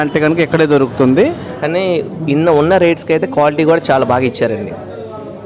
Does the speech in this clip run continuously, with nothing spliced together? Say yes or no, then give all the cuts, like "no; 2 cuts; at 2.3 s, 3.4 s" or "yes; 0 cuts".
no; 1 cut; at 1.5 s